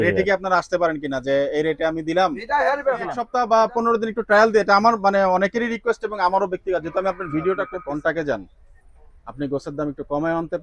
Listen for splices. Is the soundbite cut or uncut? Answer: cut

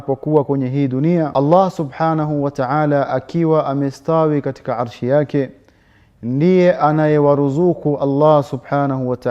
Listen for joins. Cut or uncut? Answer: cut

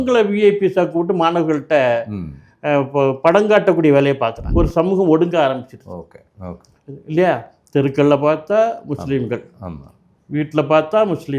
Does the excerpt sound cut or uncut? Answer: cut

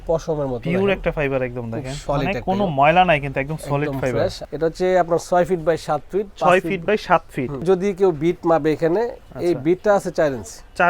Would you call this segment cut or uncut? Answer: cut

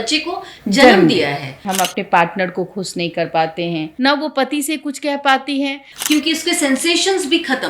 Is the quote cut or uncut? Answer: cut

